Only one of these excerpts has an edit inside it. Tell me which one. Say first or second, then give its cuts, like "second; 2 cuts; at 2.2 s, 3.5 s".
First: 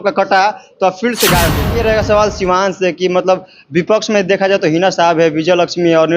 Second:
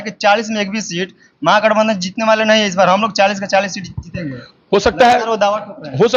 first; 1 cut; at 1.6 s